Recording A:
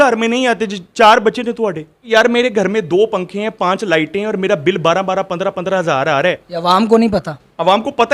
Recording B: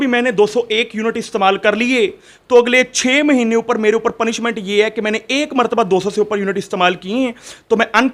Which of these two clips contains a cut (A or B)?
A